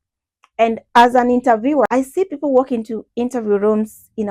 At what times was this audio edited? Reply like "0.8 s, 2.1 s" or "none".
0.8 s, 1.9 s